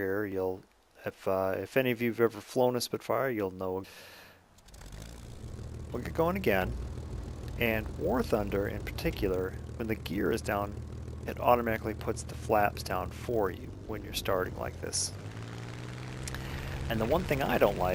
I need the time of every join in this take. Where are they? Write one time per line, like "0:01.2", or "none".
none